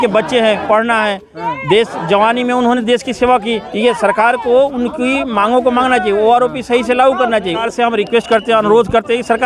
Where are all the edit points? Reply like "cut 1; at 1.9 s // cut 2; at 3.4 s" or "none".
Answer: cut 1; at 3.6 s // cut 2; at 7.6 s

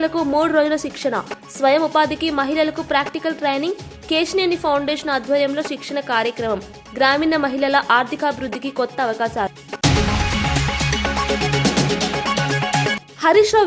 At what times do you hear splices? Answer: cut 1; at 9.6 s

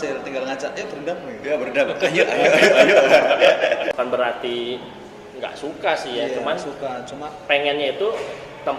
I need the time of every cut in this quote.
cut 1; at 3.9 s

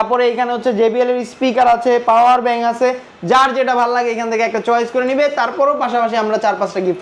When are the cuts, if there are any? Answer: none

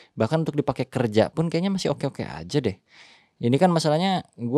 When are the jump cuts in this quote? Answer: none

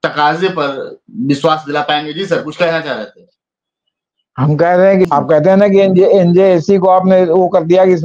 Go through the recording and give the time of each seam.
cut 1; at 5.1 s

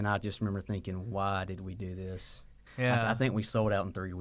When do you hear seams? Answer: cut 1; at 2.6 s

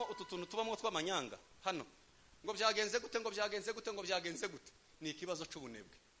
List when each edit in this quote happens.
none

